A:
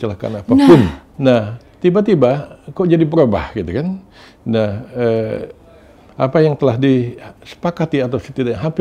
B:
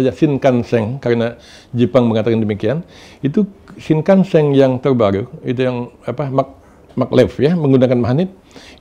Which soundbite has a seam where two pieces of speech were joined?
A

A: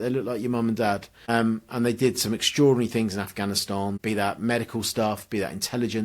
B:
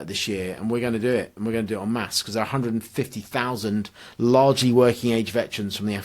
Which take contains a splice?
A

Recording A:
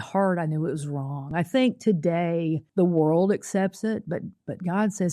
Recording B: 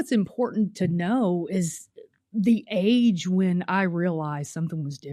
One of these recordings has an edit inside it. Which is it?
A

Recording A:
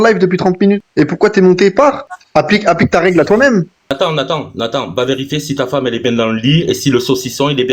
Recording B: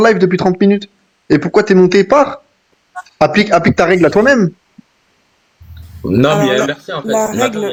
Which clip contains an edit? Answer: A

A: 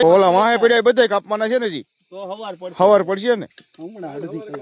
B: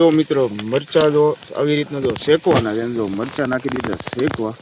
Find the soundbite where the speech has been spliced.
A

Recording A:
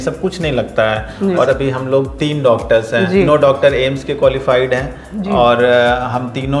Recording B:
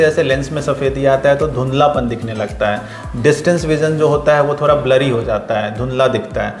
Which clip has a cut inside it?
A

